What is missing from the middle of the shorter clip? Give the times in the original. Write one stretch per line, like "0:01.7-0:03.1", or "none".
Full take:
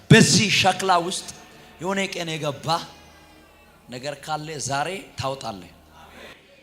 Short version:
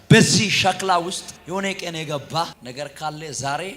0:01.3-0:01.6
0:02.9-0:03.9